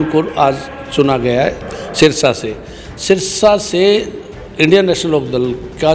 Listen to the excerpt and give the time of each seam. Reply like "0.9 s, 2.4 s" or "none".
1.6 s